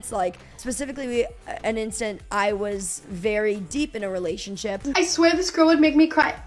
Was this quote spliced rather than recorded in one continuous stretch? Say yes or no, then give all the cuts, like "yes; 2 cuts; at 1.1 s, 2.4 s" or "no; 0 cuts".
yes; 1 cut; at 4.8 s